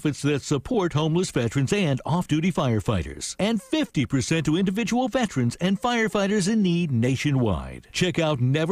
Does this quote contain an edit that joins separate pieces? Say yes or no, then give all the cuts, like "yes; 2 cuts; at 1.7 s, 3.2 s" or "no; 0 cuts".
no; 0 cuts